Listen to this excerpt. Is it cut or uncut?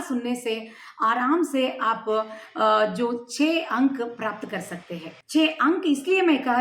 cut